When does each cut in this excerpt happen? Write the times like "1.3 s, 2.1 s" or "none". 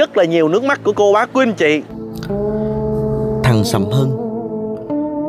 none